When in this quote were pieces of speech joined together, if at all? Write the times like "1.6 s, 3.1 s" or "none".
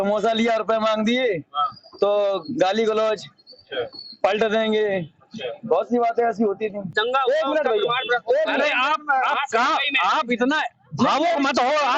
6.9 s